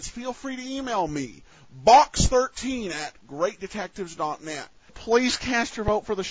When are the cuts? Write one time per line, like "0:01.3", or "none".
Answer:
0:05.0